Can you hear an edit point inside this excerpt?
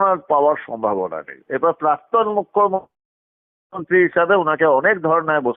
yes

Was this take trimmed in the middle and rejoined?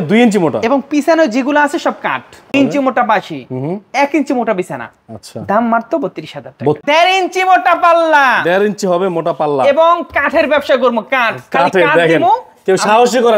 yes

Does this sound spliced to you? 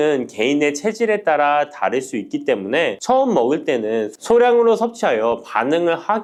no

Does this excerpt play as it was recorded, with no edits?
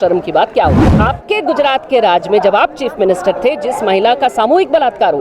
no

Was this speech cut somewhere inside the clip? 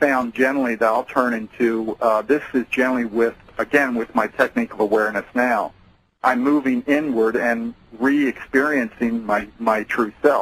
no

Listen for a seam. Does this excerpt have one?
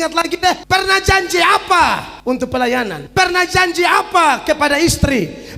no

